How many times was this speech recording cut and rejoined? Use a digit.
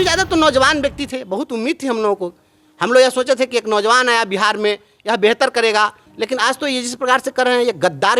1